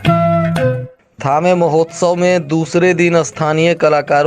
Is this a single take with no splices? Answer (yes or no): no